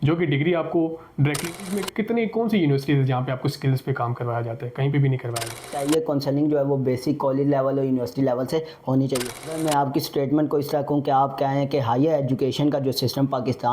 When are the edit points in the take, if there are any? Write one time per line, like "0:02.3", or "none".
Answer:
0:01.6
0:05.7
0:09.5